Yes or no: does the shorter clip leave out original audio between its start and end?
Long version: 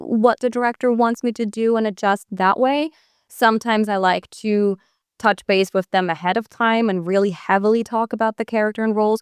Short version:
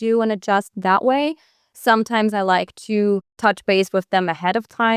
yes